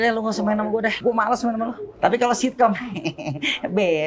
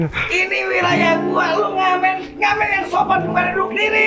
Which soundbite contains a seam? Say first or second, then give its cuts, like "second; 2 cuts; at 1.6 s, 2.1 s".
first; 2 cuts; at 1.0 s, 1.8 s